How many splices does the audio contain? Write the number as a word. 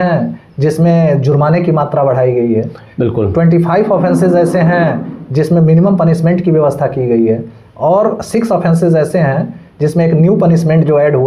zero